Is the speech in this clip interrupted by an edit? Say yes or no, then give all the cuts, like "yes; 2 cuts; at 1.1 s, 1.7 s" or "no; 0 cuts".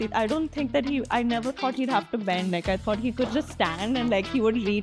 no; 0 cuts